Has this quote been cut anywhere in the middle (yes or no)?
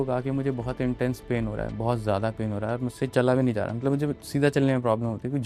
no